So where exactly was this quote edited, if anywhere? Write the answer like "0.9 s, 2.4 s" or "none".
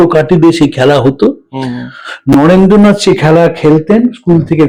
none